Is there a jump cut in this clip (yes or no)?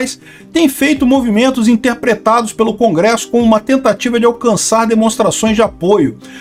no